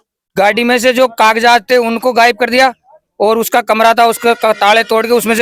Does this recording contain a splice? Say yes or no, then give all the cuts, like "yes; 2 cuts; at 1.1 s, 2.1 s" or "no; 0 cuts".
no; 0 cuts